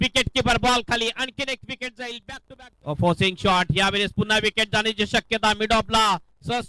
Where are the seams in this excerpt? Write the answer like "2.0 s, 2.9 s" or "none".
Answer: 2.3 s

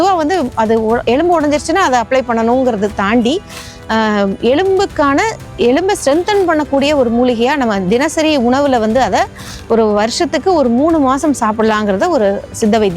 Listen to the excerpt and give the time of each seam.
none

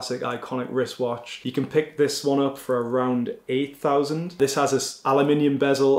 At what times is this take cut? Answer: none

